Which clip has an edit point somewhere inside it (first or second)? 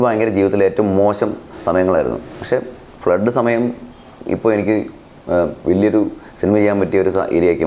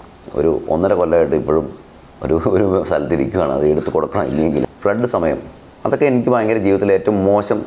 second